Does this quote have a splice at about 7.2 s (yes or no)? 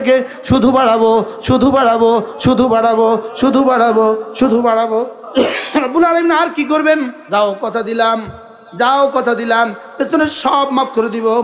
yes